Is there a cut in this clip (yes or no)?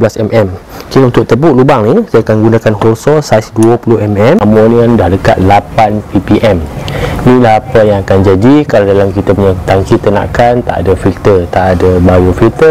yes